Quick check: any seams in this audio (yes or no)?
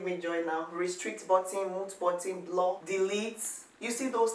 no